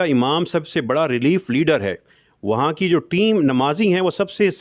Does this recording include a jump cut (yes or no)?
no